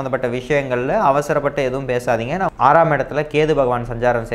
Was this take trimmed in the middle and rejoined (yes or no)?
yes